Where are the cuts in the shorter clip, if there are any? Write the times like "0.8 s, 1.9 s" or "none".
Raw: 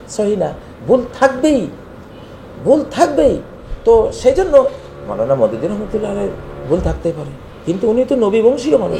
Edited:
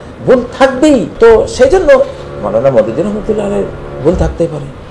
1.1 s